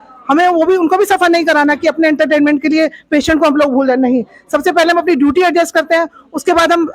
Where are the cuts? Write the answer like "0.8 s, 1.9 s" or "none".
none